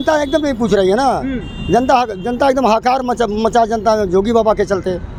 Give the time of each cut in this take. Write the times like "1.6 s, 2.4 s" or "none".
none